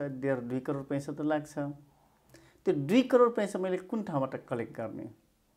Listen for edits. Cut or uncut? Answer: uncut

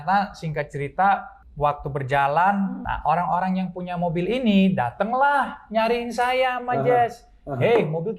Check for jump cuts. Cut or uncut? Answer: cut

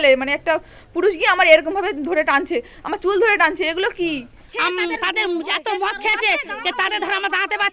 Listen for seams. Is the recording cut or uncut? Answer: cut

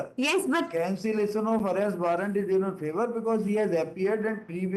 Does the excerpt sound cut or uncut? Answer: uncut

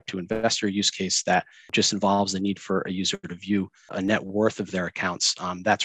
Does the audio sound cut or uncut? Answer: cut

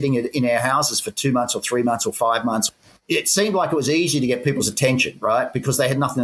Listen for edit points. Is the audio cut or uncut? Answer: uncut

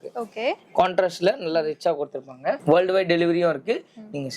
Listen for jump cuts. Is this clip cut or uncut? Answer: cut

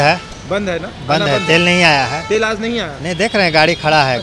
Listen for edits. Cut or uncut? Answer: uncut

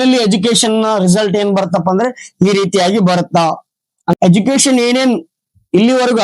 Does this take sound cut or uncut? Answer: cut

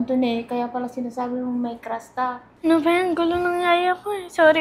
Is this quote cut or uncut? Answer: cut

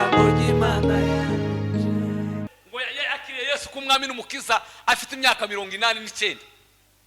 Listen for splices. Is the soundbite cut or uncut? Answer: cut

